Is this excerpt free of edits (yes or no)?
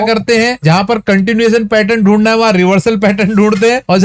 yes